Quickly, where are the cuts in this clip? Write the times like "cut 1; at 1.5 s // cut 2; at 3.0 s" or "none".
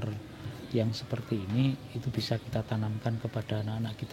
none